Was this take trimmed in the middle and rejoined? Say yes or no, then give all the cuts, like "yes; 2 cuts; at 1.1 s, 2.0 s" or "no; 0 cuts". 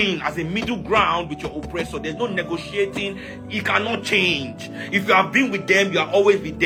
no; 0 cuts